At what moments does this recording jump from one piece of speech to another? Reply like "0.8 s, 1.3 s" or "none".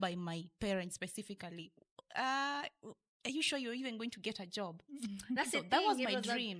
none